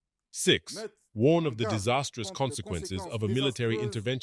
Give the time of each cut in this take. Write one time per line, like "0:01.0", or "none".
none